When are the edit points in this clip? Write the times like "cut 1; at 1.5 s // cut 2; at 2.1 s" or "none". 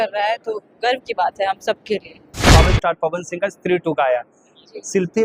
cut 1; at 2.5 s